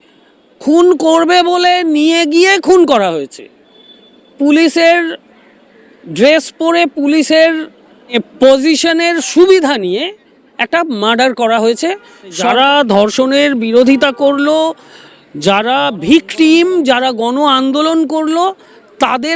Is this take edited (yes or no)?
yes